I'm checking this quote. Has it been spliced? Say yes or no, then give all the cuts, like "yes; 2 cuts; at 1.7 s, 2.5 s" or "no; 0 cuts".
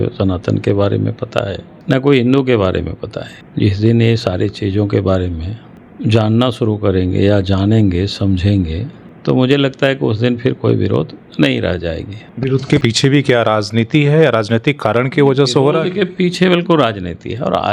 no; 0 cuts